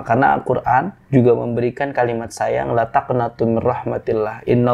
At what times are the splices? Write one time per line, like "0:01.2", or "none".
0:01.0